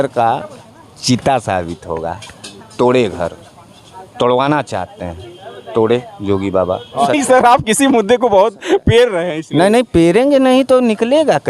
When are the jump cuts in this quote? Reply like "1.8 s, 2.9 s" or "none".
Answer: 7.1 s